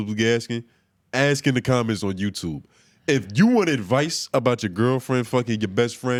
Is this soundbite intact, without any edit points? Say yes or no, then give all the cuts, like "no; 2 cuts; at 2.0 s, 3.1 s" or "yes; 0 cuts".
yes; 0 cuts